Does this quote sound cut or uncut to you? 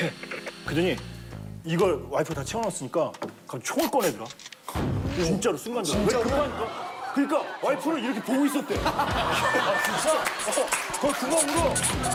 uncut